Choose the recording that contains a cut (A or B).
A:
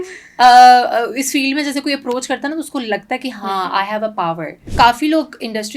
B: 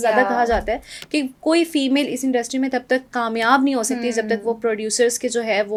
A